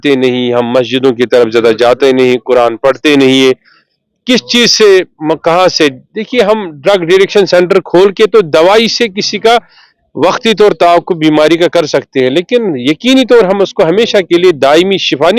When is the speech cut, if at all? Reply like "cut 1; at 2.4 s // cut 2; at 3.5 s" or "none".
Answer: none